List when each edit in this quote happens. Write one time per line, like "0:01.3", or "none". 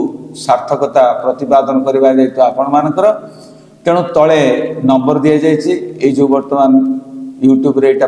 none